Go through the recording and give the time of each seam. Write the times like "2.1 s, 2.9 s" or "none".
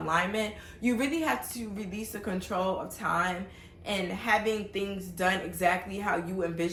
none